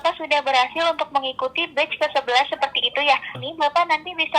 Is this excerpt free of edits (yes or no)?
no